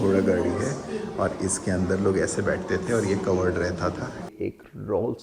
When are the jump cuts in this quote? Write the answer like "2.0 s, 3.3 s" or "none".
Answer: 4.3 s